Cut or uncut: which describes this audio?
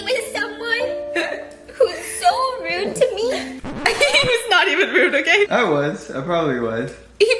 uncut